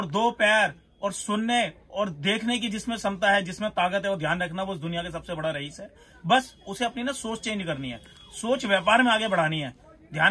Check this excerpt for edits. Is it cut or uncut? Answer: uncut